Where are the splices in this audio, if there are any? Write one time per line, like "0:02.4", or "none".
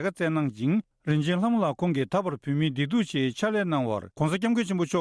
0:00.9
0:04.1